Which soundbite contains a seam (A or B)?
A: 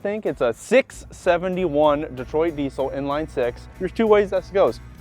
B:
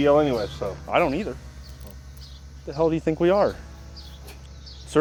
A